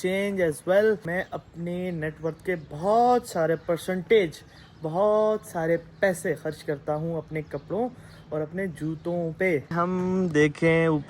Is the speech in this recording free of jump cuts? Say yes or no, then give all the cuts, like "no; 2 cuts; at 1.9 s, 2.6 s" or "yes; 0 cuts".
no; 2 cuts; at 1.1 s, 9.7 s